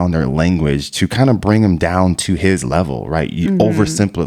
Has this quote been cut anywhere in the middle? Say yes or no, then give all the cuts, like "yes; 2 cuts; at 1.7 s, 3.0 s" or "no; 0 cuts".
no; 0 cuts